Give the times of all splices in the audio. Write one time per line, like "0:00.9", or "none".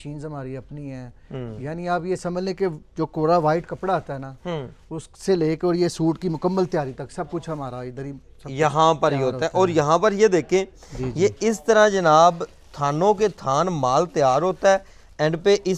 none